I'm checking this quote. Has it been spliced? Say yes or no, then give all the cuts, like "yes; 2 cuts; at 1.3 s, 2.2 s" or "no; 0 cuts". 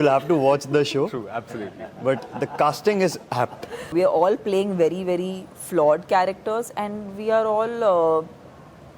yes; 1 cut; at 3.9 s